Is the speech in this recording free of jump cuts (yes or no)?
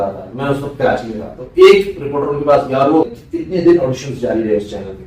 no